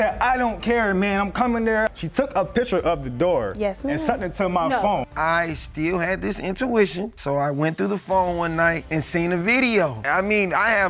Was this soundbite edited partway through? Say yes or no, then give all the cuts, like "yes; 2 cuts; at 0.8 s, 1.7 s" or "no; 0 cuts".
yes; 1 cut; at 5.1 s